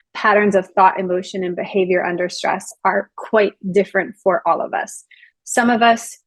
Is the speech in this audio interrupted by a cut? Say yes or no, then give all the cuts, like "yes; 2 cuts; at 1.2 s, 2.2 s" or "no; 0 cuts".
no; 0 cuts